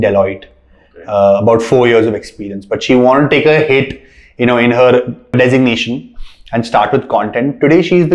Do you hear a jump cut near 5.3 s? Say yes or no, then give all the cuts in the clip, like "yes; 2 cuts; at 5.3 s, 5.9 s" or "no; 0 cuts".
yes; 1 cut; at 5.3 s